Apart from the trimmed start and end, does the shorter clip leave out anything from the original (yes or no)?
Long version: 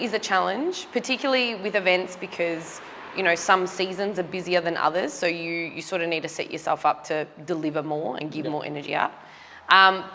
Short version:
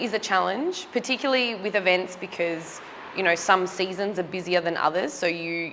no